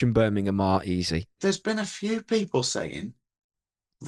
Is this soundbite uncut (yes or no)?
no